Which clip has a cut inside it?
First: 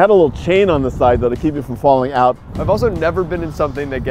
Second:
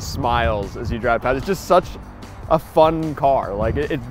first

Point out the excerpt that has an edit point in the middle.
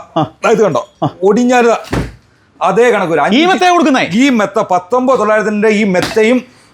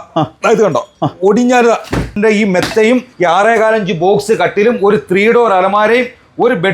second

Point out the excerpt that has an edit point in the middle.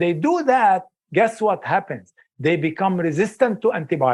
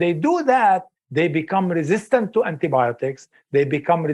second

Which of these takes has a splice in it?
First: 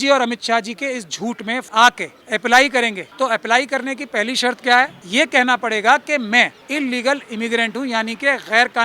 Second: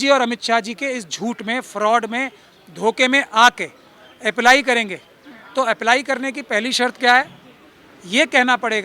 first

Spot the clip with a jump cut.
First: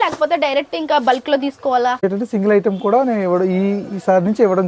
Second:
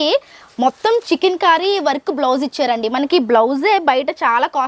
first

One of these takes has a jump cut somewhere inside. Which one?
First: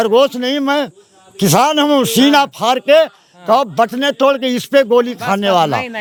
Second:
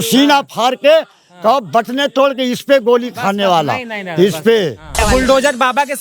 second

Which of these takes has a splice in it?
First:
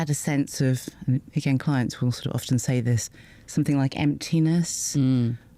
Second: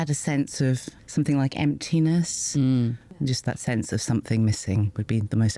second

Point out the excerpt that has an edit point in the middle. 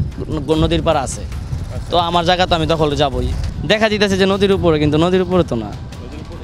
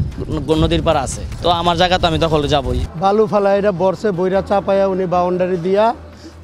second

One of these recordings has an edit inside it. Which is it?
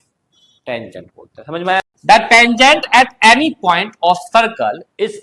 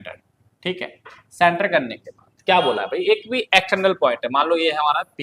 first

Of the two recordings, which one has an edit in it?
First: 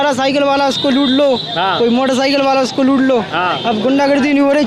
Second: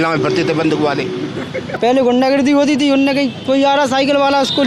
second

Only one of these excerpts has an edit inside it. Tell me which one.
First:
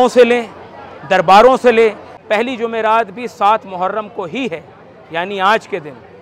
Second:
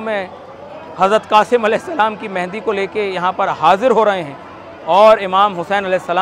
first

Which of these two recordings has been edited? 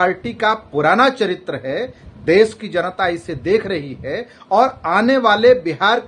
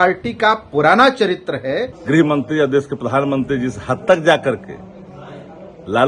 second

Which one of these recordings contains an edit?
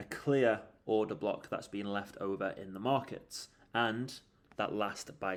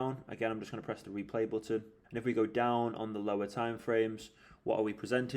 second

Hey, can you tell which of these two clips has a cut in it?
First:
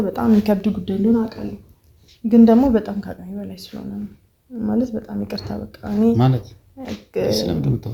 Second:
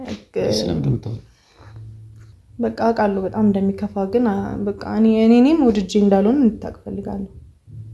second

